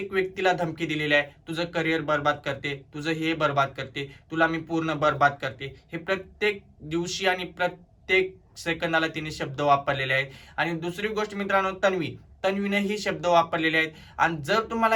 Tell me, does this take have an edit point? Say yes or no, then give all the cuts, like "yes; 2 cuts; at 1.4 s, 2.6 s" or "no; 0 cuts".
no; 0 cuts